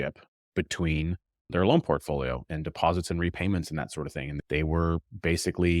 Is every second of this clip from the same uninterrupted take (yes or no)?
no